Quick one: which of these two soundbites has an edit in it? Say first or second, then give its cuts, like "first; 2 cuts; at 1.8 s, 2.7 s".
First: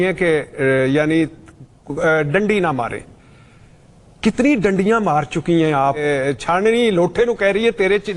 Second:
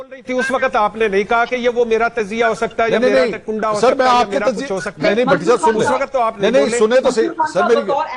first; 1 cut; at 6.0 s